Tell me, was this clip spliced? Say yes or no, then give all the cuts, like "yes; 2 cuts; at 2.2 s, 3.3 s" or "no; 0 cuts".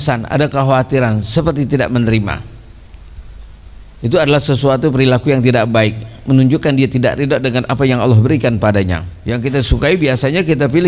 yes; 1 cut; at 9.1 s